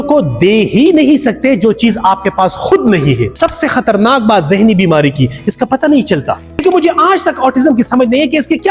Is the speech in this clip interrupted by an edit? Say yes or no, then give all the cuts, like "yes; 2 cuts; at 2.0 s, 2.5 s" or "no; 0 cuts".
yes; 2 cuts; at 3.3 s, 6.6 s